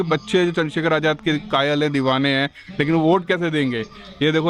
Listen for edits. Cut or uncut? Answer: uncut